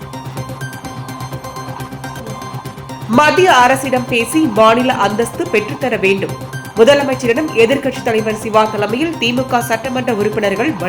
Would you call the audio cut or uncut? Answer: cut